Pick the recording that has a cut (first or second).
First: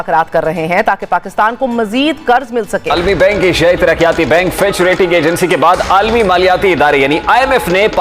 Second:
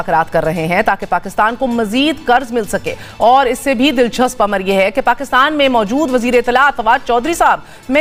first